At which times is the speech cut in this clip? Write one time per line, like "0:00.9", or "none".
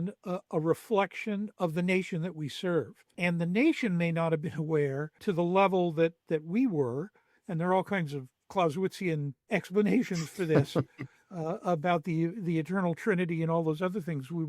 0:01.5
0:03.0
0:05.1
0:09.4